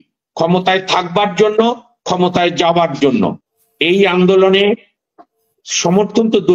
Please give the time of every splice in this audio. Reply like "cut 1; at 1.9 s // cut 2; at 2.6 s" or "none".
cut 1; at 3.5 s